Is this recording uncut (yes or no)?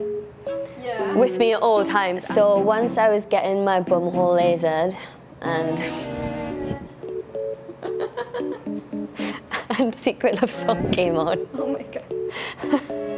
no